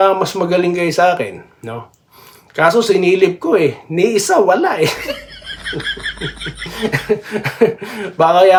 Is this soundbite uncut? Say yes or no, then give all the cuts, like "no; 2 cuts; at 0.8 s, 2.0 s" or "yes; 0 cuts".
yes; 0 cuts